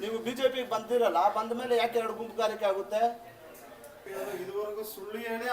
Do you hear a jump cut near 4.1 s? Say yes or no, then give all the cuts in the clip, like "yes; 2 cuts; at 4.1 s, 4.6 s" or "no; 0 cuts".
yes; 1 cut; at 4.1 s